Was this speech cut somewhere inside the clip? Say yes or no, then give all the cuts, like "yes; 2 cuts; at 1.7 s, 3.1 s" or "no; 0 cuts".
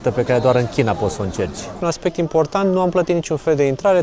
yes; 1 cut; at 1.8 s